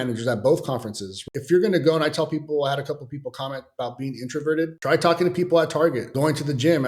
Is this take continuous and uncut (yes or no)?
no